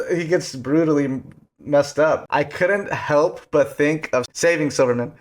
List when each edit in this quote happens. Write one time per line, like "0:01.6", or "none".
0:02.2
0:04.3